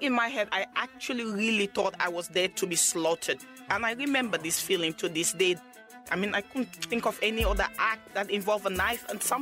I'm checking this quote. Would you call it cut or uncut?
cut